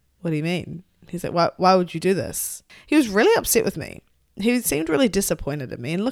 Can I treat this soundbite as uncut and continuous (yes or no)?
no